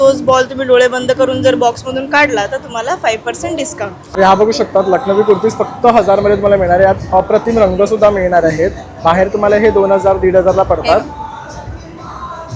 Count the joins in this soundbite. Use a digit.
1